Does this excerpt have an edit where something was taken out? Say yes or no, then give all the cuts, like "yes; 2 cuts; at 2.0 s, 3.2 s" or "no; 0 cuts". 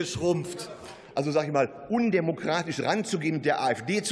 yes; 1 cut; at 1.0 s